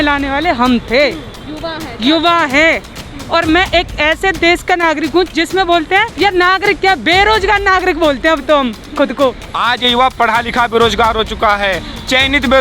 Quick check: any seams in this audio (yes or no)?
yes